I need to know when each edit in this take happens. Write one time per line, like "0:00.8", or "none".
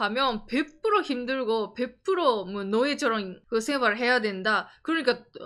0:03.3